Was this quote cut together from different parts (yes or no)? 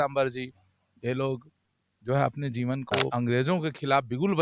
yes